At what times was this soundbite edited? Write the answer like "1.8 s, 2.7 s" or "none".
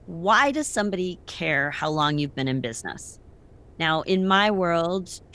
none

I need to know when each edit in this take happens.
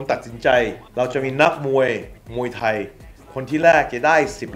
none

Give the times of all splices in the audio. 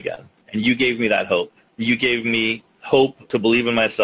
1.6 s, 3.0 s

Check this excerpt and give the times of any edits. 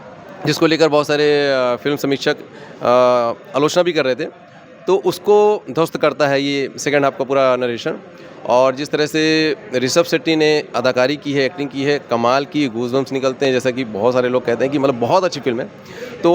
none

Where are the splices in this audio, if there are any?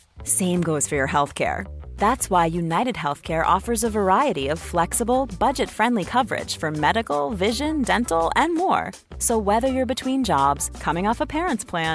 none

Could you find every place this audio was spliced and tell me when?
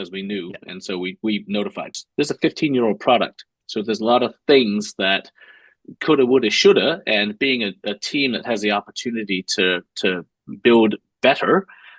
1.9 s

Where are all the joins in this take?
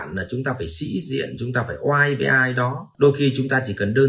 2.8 s

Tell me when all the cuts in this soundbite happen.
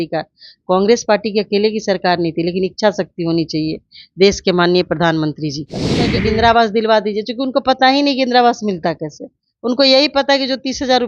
6.1 s

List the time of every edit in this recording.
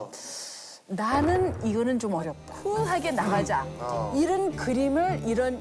2.4 s

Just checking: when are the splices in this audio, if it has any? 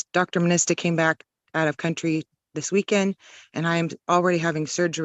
none

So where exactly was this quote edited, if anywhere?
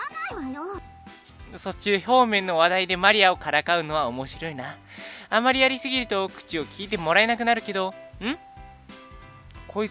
1.9 s

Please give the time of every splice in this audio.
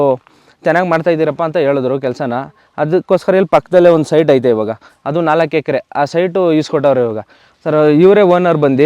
7.5 s

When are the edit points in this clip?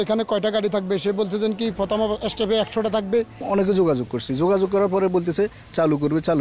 3.4 s

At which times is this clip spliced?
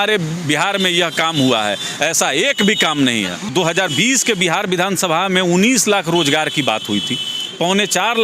3.5 s

